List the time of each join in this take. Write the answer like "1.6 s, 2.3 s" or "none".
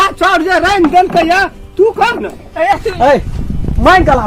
2.8 s

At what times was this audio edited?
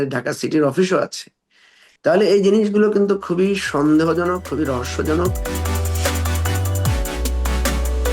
5.4 s

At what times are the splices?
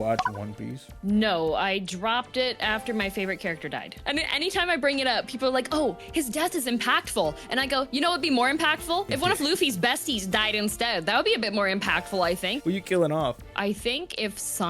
4.0 s, 12.6 s

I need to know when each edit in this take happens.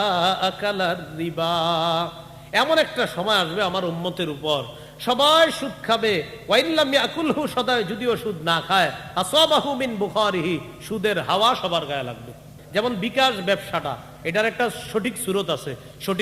12.5 s

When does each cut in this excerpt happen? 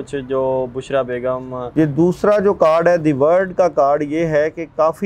1.7 s

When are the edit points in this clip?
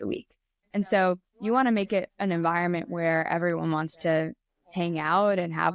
none

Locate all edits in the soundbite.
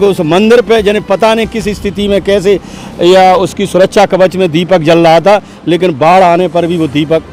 none

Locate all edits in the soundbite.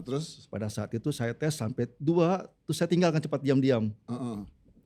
none

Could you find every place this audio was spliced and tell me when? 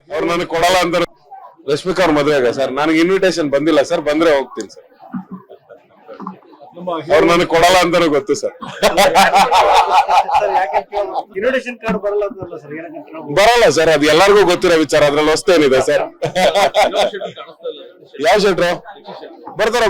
1.1 s

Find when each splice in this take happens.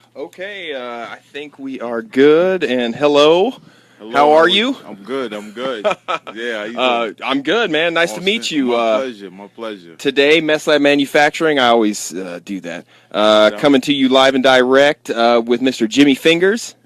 11.5 s

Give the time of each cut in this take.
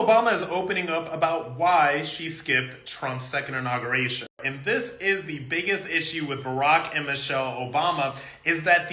4.4 s

